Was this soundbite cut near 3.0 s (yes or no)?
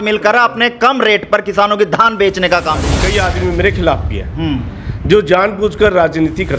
yes